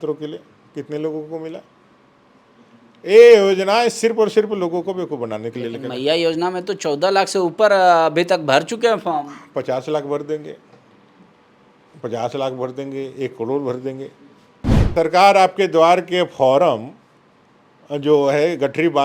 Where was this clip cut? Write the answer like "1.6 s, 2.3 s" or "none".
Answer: 14.8 s